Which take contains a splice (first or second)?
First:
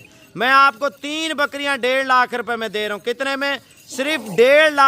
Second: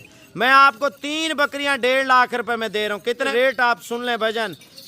second